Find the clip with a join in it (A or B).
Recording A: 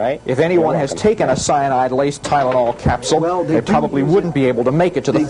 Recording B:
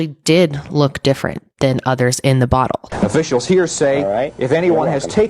B